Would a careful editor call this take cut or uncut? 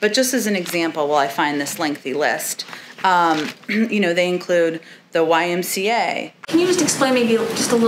cut